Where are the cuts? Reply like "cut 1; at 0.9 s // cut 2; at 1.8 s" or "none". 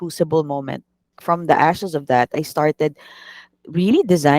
cut 1; at 1.2 s